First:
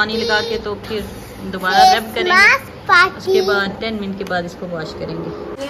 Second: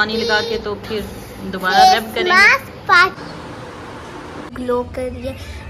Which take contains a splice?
second; 2 cuts; at 3.2 s, 4.5 s

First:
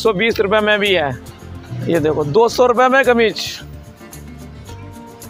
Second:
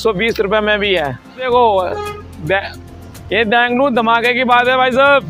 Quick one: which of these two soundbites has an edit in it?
second; 1 cut; at 1.5 s

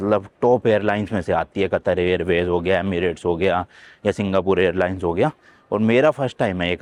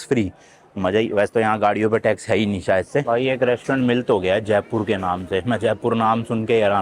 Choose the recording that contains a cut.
second; 1 cut; at 3.0 s

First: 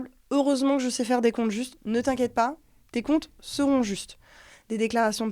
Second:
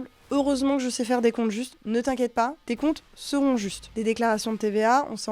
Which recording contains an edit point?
second; 2 cuts; at 2.6 s, 3.8 s

